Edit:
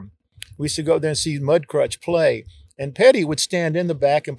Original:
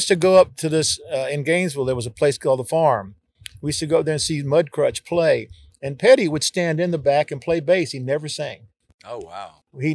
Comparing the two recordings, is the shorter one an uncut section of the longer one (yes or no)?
yes